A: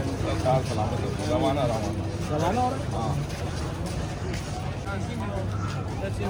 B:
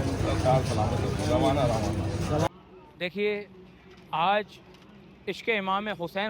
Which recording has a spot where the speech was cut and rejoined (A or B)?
B